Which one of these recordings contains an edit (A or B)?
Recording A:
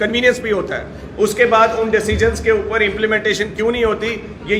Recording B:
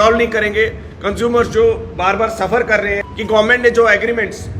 B